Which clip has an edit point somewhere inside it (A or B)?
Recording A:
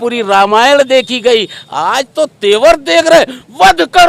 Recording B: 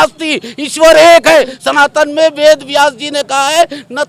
B